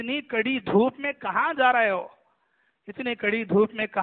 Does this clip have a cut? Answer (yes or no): no